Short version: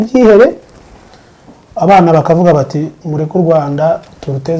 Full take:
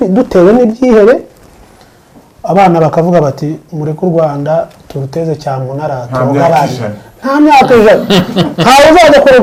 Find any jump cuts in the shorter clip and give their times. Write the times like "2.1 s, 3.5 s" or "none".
none